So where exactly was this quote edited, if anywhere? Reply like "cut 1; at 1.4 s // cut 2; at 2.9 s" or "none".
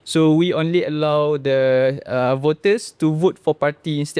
none